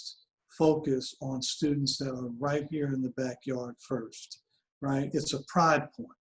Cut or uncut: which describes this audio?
uncut